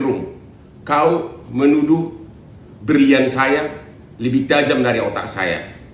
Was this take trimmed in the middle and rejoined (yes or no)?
yes